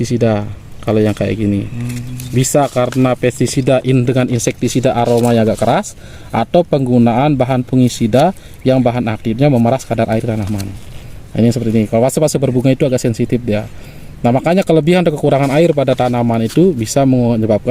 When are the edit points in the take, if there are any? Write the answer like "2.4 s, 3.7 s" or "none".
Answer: none